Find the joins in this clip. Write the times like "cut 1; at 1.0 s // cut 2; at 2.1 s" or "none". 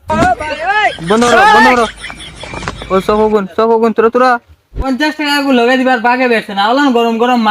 cut 1; at 4.8 s